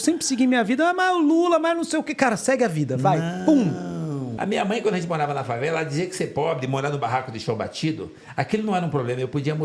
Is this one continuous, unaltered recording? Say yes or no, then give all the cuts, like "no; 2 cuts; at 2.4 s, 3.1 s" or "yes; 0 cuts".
no; 1 cut; at 4.3 s